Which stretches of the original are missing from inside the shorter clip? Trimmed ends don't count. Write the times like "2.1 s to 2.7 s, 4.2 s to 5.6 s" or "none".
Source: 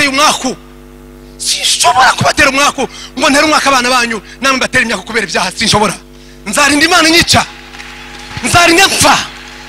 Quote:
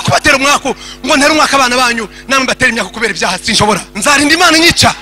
6.0 s to 6.4 s